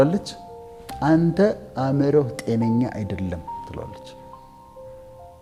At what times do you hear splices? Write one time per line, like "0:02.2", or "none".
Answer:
none